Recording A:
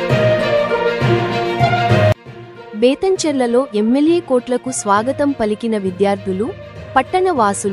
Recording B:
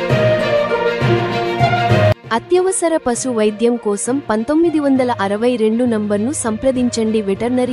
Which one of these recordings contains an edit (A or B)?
A